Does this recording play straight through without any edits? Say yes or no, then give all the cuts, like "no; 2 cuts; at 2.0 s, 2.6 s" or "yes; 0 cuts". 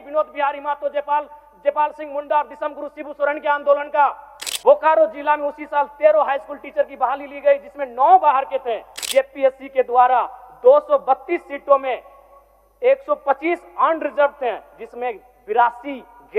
no; 2 cuts; at 4.4 s, 8.9 s